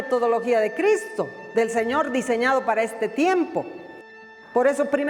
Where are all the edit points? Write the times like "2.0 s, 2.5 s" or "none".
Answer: 4.1 s